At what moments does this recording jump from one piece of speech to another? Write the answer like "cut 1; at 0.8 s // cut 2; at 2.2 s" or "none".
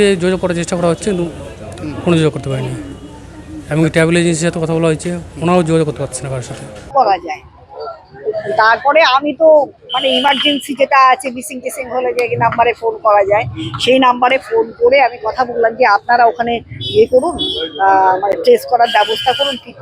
cut 1; at 6.9 s